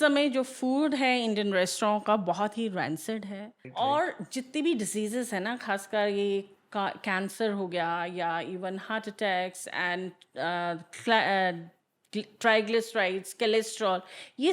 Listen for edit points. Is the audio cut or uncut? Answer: cut